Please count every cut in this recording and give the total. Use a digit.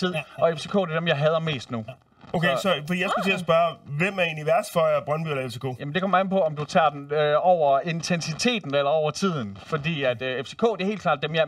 0